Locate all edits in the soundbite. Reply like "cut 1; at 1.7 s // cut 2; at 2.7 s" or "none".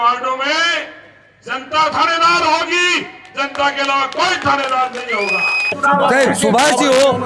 cut 1; at 5.8 s